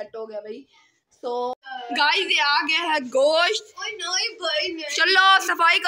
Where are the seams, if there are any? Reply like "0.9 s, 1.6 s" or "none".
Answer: 1.6 s